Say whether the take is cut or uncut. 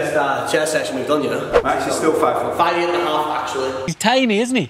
cut